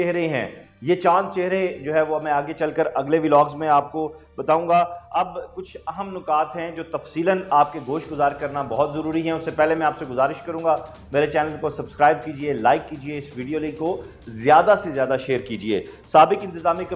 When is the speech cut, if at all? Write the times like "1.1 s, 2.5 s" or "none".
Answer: none